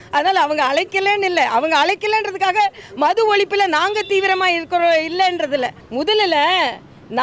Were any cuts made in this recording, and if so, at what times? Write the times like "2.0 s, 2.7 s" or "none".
5.8 s